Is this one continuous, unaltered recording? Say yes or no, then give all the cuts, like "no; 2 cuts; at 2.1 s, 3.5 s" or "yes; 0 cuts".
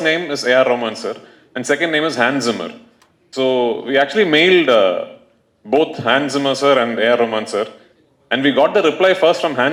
yes; 0 cuts